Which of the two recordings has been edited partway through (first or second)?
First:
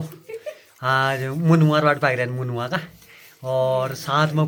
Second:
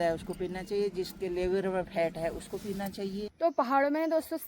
second